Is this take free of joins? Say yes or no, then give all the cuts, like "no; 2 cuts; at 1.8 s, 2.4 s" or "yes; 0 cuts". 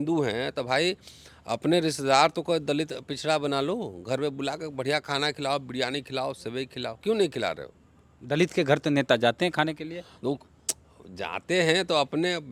yes; 0 cuts